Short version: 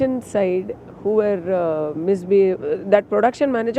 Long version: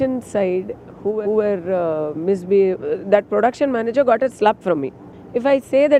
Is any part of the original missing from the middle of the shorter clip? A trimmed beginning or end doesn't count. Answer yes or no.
yes